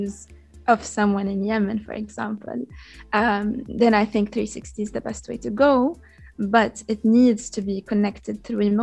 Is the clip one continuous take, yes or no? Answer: yes